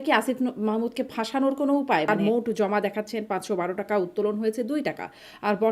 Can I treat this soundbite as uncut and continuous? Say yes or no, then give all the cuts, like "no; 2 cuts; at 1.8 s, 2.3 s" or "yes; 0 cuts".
no; 1 cut; at 2.1 s